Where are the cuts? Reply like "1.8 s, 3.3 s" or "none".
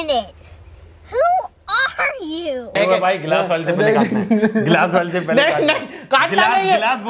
2.8 s